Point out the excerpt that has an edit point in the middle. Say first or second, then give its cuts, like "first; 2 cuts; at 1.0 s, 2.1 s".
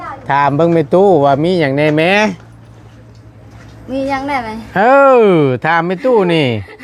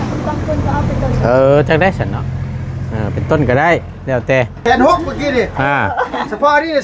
second; 1 cut; at 4.5 s